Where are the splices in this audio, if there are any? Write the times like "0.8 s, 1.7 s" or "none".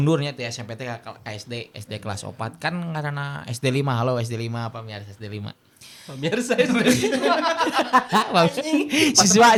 none